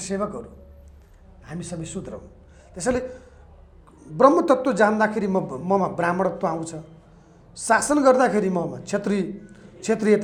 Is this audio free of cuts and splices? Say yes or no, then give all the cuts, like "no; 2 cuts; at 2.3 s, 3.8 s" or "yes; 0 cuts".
yes; 0 cuts